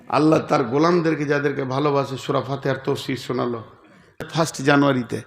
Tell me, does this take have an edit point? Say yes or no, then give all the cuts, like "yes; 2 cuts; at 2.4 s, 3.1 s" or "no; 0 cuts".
yes; 1 cut; at 4.2 s